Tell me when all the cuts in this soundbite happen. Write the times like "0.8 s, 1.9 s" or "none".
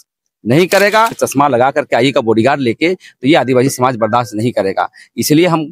1.2 s